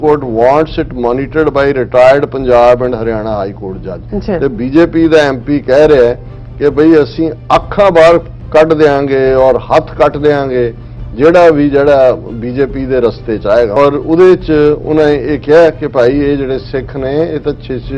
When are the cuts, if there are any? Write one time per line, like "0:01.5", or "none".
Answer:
0:04.0
0:13.8

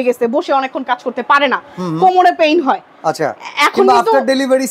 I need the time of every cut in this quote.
none

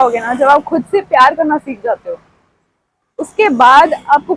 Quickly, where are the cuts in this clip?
none

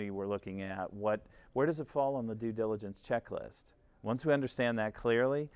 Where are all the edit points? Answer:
none

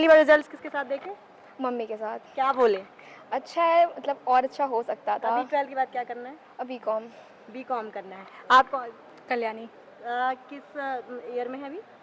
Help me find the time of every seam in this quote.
none

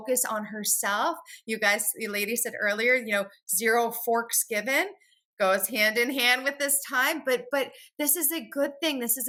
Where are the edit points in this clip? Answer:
none

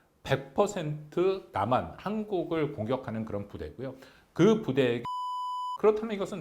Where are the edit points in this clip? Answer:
0:05.1

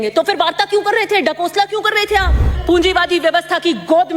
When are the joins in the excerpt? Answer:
0:02.6

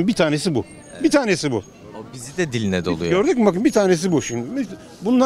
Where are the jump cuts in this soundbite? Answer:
none

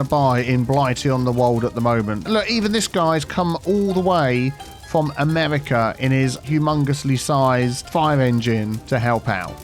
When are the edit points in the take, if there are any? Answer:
0:02.2
0:06.4

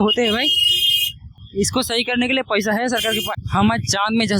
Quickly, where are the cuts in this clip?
0:03.4

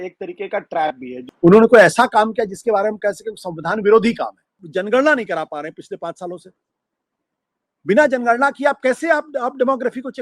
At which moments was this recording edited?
0:01.2
0:04.6

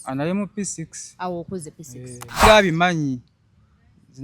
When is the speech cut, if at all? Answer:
0:02.4

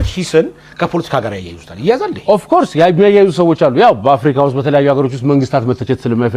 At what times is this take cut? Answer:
none

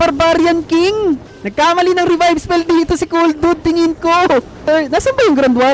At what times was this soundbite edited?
0:01.4
0:04.5

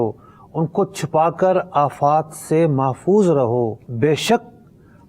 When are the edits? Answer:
0:03.8

